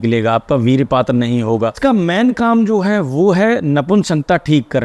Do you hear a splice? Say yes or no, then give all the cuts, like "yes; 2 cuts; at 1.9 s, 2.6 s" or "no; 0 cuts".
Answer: yes; 1 cut; at 1.8 s